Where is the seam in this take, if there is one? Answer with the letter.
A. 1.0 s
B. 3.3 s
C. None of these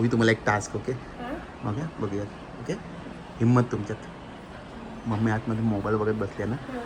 C